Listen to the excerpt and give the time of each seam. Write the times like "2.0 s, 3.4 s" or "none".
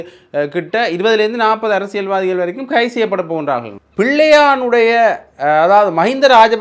3.8 s

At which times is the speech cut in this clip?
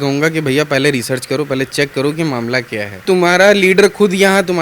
3.0 s

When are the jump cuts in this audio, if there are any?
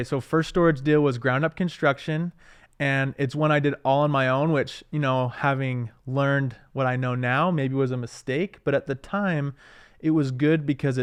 none

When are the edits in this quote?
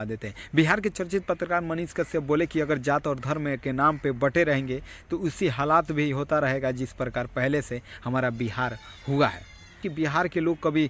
9.9 s

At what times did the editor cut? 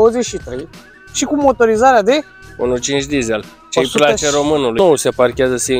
4.8 s

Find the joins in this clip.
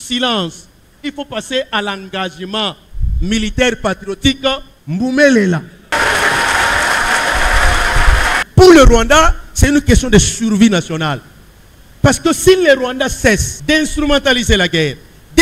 5.9 s, 8.4 s, 13.5 s

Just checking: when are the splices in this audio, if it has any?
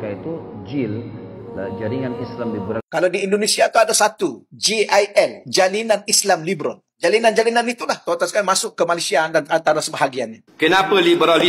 2.8 s, 10.4 s

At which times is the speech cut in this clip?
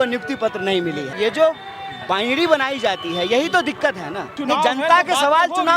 1.1 s, 4.3 s

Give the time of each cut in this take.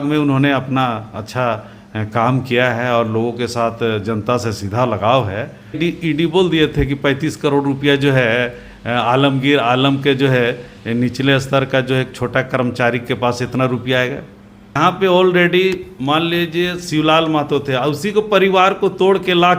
5.8 s, 14.8 s

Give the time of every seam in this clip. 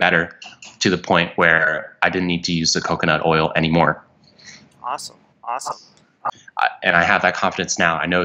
6.4 s

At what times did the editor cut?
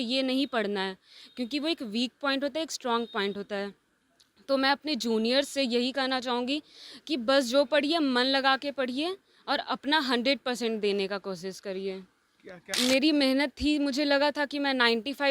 12.6 s

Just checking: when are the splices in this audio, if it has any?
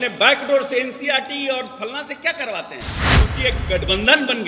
3.2 s

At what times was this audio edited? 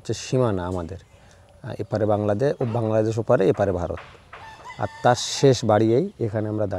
none

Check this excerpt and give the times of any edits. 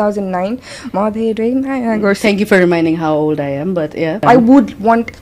4.2 s

